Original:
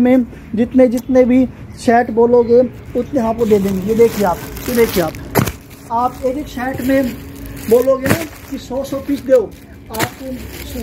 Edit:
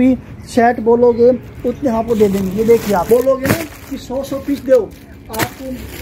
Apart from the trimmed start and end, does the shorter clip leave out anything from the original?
yes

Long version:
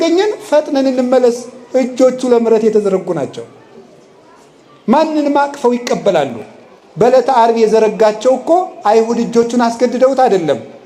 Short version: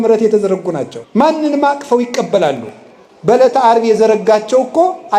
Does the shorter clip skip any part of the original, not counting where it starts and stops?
yes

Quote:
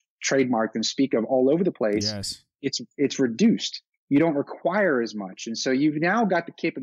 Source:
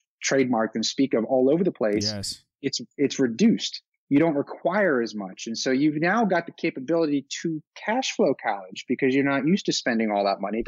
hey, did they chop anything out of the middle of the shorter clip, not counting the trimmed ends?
no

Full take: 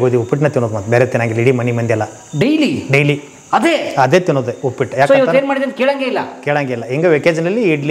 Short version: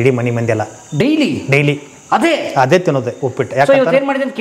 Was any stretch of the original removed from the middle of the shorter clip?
no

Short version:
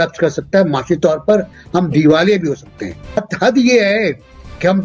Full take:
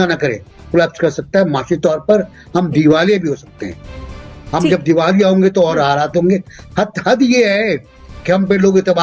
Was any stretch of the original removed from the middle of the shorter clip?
yes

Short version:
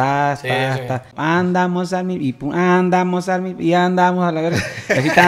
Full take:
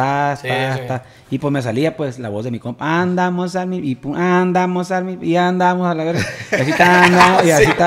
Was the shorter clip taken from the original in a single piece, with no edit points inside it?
no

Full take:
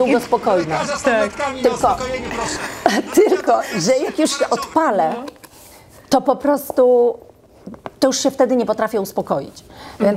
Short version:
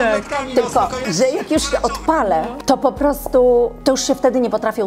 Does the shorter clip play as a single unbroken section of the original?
no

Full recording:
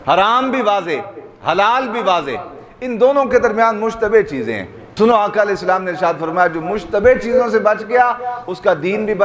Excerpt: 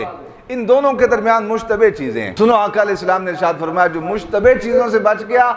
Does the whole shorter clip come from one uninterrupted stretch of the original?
no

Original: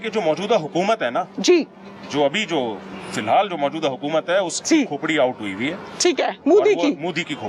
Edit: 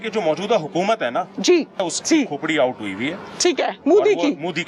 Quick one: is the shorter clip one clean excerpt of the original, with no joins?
no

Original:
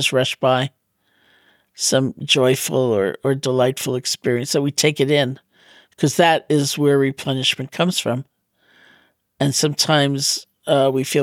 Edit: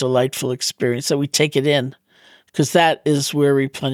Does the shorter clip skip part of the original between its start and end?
no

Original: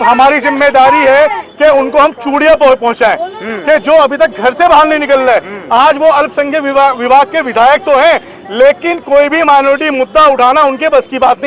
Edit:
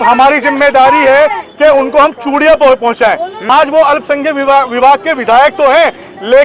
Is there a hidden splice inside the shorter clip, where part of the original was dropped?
yes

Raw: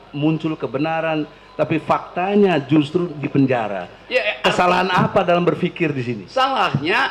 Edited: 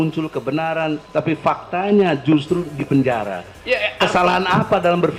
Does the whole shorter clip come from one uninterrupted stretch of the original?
no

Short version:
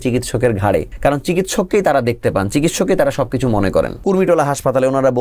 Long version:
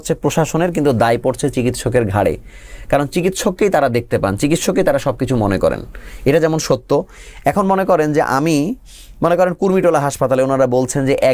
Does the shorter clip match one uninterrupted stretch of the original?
no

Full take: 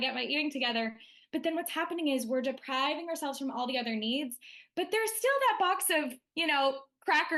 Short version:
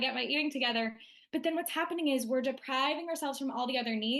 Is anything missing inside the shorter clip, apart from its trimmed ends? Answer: no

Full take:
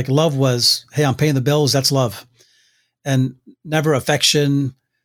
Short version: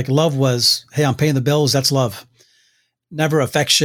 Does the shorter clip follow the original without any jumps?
no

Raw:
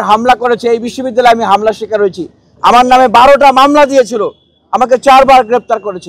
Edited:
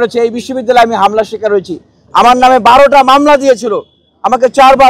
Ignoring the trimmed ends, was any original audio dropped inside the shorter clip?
no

